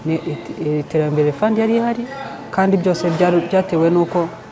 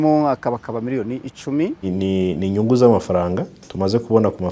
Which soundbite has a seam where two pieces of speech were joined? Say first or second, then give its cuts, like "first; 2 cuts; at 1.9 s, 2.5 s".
second; 1 cut; at 1.9 s